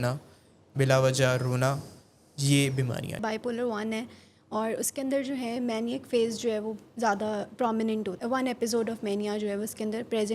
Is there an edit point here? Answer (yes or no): yes